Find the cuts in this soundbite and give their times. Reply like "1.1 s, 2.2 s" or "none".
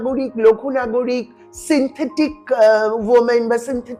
none